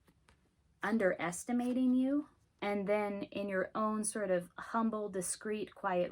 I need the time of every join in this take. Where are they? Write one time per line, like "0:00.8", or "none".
0:02.4